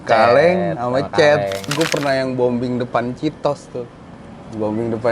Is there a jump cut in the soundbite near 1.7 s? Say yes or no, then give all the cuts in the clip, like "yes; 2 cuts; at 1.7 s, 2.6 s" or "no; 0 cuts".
yes; 1 cut; at 1.7 s